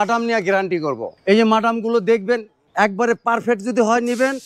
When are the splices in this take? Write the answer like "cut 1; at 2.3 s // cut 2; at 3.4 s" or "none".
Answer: cut 1; at 1.1 s // cut 2; at 2.6 s